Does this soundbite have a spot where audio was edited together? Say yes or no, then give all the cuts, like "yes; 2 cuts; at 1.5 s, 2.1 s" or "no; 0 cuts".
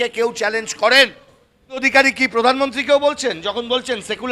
yes; 1 cut; at 1.9 s